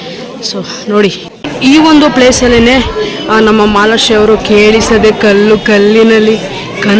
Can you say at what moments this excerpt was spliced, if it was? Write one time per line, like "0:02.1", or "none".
0:01.5